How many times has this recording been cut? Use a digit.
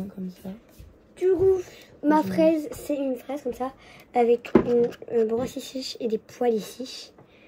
0